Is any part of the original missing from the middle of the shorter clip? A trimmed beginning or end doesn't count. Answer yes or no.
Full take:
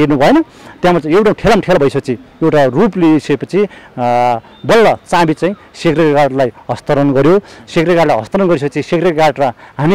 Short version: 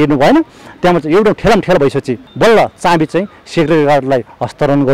yes